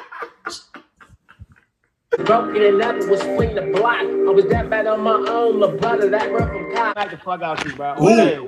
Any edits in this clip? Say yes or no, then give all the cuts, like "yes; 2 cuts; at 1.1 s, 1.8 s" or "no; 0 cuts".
yes; 2 cuts; at 2.2 s, 7.0 s